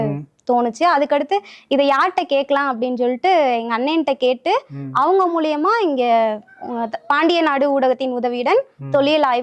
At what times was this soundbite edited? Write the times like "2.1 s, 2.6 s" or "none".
none